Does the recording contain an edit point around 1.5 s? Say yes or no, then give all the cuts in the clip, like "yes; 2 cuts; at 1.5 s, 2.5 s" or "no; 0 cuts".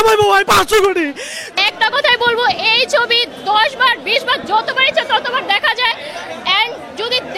yes; 1 cut; at 1.5 s